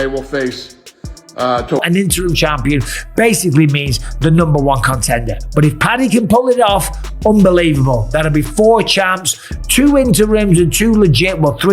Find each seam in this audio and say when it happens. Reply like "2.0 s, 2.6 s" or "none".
1.8 s